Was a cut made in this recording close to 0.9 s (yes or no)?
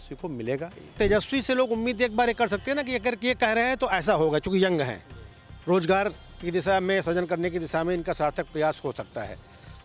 yes